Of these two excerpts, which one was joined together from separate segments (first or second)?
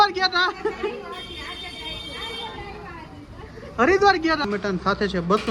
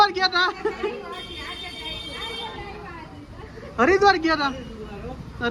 first